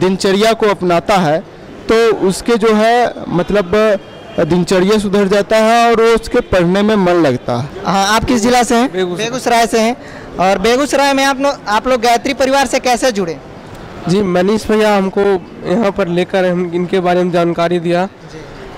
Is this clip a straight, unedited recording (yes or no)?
no